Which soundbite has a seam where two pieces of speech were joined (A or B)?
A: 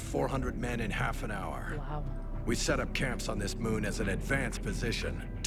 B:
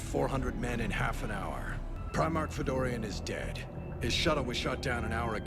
B